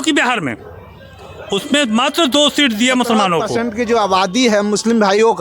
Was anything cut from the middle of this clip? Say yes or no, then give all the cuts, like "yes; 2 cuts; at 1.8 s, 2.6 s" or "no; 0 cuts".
yes; 1 cut; at 3.5 s